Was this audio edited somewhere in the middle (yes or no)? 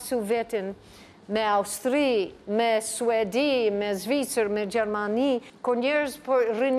yes